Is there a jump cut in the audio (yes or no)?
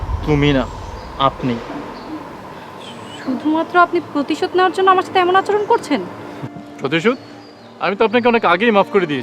no